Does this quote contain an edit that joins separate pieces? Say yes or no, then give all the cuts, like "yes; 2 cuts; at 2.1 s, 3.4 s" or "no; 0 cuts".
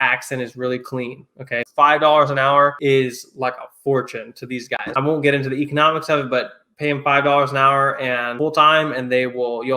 yes; 1 cut; at 1.6 s